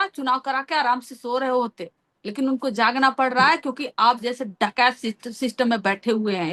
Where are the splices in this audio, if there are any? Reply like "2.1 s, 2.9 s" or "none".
none